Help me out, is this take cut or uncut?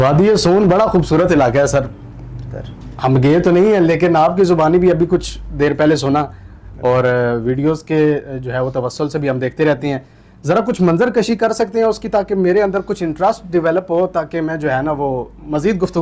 uncut